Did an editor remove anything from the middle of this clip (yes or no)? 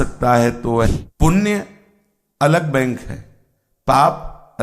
yes